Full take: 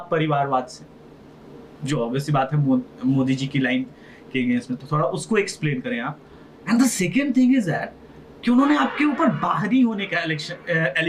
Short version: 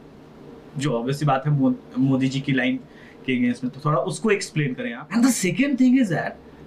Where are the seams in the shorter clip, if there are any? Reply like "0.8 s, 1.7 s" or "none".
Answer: 4.9 s